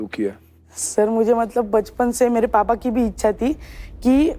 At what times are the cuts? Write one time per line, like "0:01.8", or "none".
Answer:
none